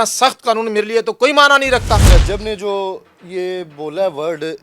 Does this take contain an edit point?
yes; 1 cut; at 2.1 s

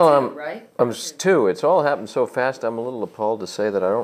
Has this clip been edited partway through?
yes; 1 cut; at 2.9 s

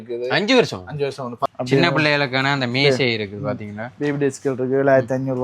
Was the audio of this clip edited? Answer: yes; 1 cut; at 1.5 s

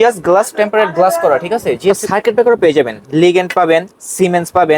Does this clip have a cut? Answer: yes; 1 cut; at 2.0 s

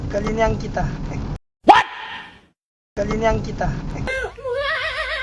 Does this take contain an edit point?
no; 0 cuts

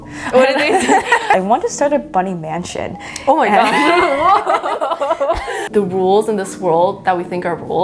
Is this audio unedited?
no; 2 cuts; at 1.3 s, 5.5 s

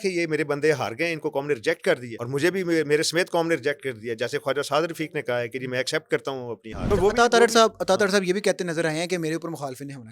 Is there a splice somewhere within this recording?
yes; 2 cuts; at 2.1 s, 6.8 s

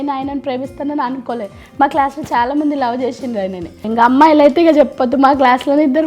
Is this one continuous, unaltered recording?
no; 1 cut; at 3.9 s

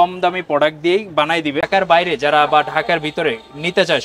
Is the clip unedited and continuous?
no; 1 cut; at 1.7 s

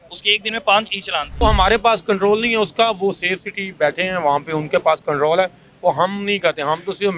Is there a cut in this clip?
yes; 1 cut; at 1.4 s

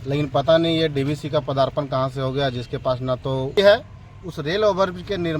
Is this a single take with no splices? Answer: no; 1 cut; at 3.6 s

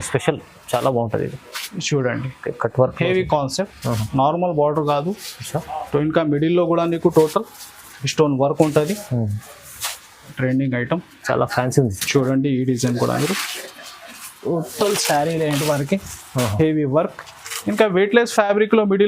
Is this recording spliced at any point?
yes; 1 cut; at 10.3 s

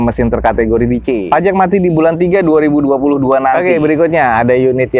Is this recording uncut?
no; 2 cuts; at 1.2 s, 3.6 s

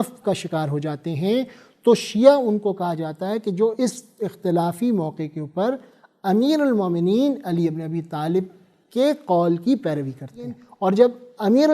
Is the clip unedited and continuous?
no; 1 cut; at 10.6 s

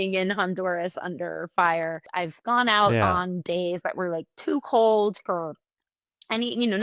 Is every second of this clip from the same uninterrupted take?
no; 1 cut; at 2.0 s

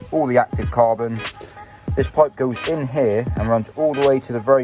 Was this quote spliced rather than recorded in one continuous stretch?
no; 0 cuts

